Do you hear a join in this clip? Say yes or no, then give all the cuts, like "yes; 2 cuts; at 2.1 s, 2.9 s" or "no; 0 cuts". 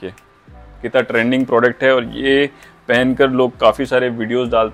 no; 0 cuts